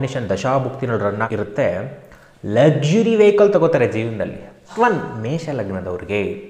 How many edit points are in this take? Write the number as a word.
two